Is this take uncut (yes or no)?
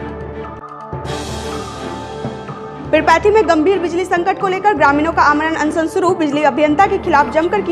yes